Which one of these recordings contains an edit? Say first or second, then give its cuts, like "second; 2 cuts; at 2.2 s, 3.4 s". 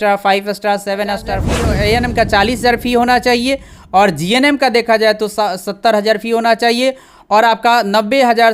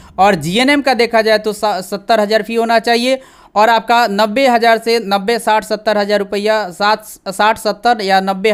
first; 1 cut; at 1.5 s